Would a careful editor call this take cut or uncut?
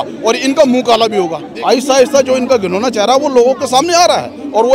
cut